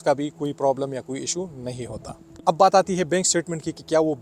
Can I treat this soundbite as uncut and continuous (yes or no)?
no